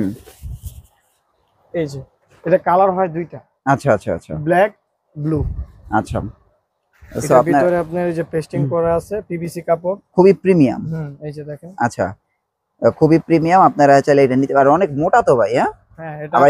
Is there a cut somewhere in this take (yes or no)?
no